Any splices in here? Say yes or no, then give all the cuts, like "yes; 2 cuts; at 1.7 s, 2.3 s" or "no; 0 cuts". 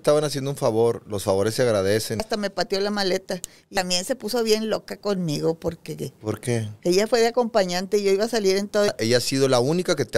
yes; 3 cuts; at 2.2 s, 3.7 s, 8.9 s